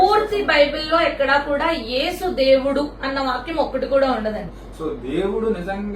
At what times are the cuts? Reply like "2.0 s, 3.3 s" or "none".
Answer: 4.6 s